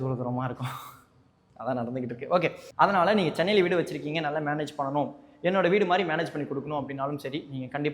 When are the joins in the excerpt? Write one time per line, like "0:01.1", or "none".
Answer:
0:02.7

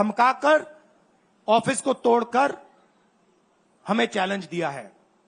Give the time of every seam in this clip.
none

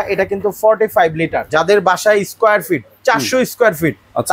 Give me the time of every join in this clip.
0:01.4

